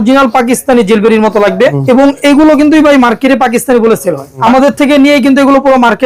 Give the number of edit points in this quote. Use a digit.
2